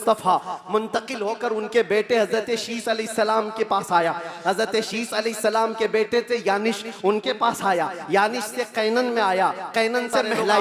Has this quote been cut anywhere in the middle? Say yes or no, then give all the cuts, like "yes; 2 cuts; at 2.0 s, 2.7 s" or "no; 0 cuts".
no; 0 cuts